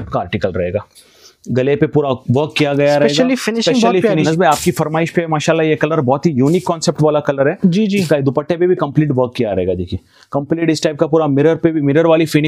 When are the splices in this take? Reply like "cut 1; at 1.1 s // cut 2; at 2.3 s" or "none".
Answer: cut 1; at 4.3 s